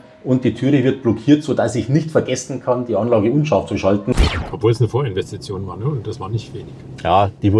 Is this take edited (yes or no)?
yes